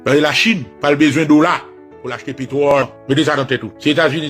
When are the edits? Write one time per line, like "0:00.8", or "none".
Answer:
0:02.8